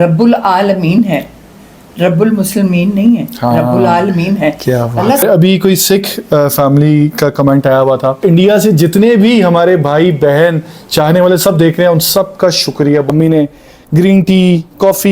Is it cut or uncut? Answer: cut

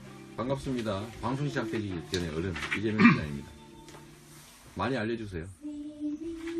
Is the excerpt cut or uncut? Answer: uncut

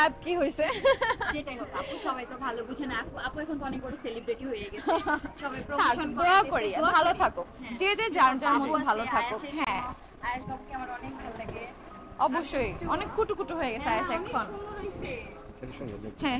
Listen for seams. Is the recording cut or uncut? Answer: uncut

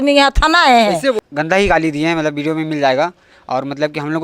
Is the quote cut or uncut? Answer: cut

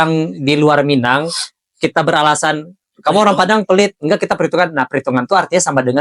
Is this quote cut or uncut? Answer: uncut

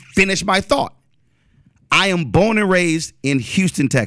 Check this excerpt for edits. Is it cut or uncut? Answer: uncut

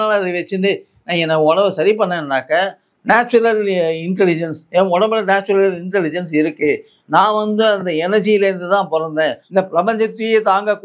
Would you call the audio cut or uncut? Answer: cut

